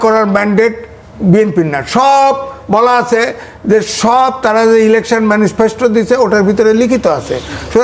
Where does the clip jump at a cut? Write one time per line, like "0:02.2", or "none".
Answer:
none

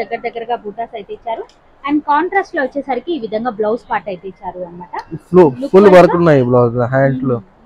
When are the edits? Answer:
none

